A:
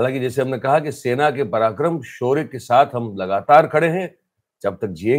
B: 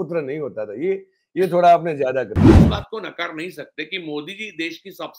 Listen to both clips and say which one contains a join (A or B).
B